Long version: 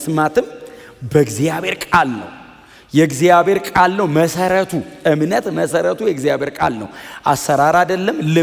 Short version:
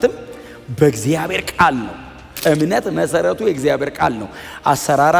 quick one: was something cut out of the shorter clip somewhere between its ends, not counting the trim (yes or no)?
yes